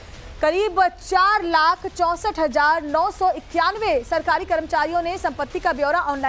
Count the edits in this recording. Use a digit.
1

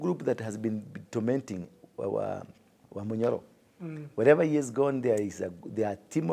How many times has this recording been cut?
1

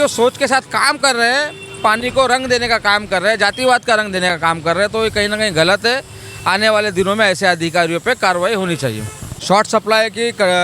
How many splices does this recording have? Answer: 1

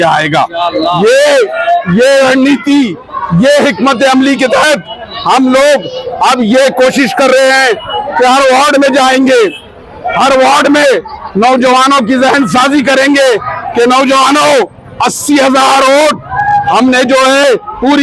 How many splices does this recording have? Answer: 0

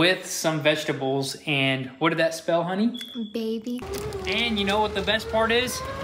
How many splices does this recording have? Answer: 1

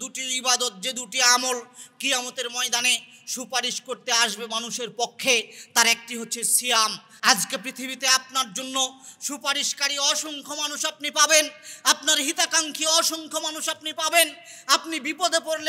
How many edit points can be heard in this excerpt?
1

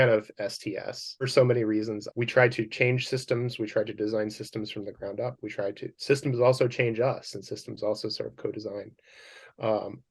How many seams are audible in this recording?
2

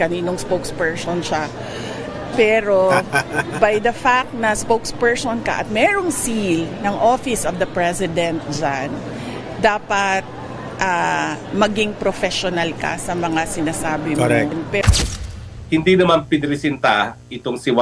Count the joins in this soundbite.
1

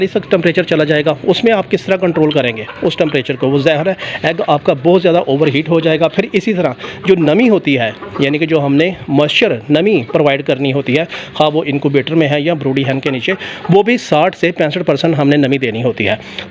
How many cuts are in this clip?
0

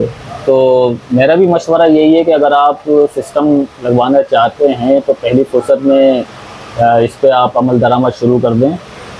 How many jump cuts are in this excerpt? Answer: 0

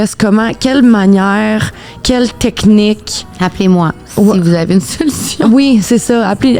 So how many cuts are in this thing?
0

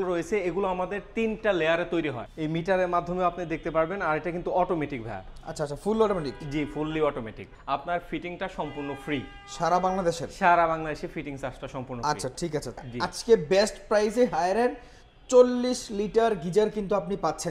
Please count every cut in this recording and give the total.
3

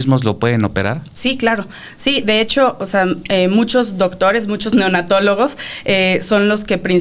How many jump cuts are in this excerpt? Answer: 0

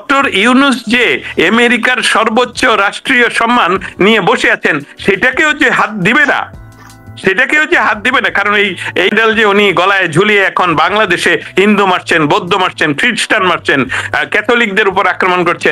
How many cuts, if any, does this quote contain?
1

